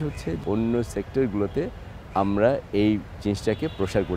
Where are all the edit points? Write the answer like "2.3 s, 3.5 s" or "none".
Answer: none